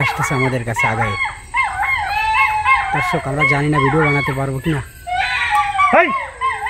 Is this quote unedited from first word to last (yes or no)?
yes